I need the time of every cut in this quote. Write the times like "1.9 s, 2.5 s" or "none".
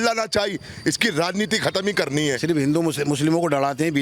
2.9 s